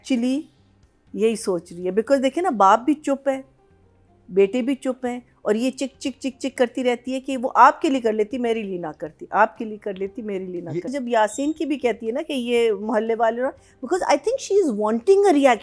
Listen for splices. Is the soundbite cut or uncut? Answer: cut